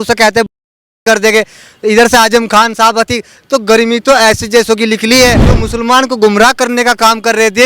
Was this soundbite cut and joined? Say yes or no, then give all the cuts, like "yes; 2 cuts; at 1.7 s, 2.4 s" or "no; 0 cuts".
yes; 1 cut; at 5.5 s